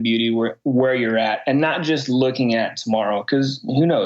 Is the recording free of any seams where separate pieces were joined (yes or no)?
yes